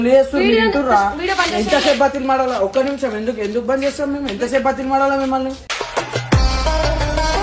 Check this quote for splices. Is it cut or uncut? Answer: uncut